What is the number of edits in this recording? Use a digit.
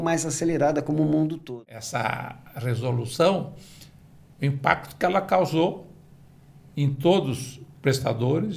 1